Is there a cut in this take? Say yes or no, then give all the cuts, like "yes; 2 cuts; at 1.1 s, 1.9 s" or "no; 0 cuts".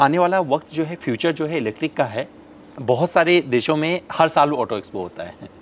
yes; 1 cut; at 2.7 s